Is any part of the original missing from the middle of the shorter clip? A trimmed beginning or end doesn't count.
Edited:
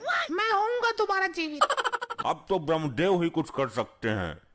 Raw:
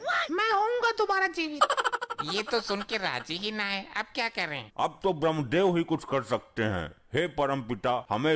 yes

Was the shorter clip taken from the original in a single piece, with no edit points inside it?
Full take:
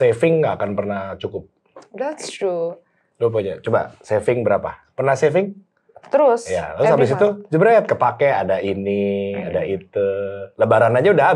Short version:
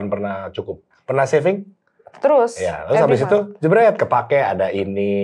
no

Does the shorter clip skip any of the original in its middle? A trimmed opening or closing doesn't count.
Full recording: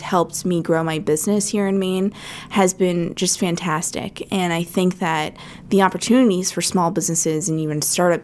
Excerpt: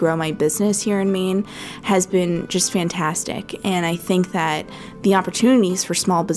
no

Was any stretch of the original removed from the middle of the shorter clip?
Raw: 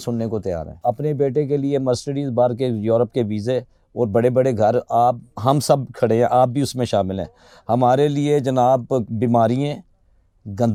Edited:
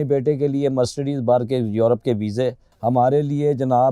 yes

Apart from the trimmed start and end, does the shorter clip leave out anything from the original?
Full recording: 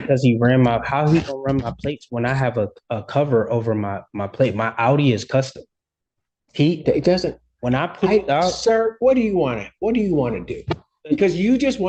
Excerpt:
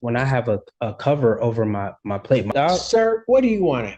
yes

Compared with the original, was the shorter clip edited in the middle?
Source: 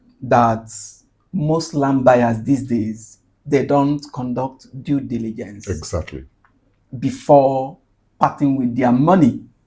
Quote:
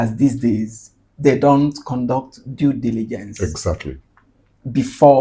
no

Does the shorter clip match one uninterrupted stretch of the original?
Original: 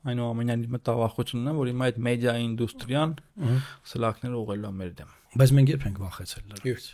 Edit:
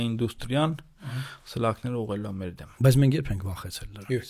no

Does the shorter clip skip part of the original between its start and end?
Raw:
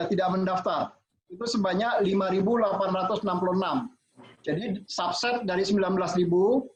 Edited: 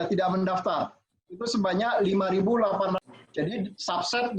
yes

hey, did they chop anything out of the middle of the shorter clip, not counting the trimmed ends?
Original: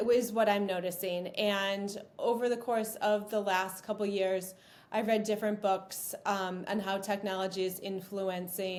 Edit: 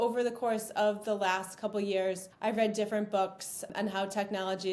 yes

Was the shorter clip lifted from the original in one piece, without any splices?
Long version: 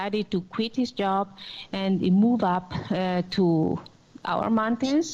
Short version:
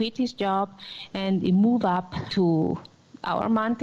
no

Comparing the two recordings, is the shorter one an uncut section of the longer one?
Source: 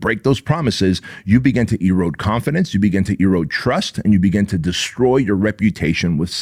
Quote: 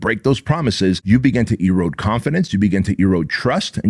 no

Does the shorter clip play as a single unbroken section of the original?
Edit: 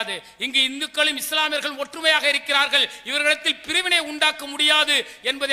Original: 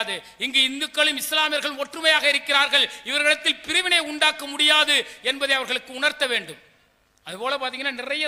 yes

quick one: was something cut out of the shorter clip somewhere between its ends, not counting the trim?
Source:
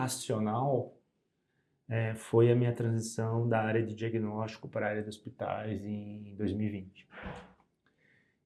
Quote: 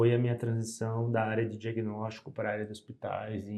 no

